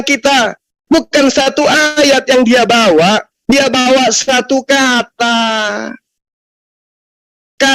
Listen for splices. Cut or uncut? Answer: uncut